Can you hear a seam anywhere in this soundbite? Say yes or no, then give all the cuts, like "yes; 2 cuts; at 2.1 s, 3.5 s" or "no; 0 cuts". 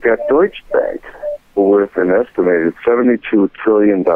no; 0 cuts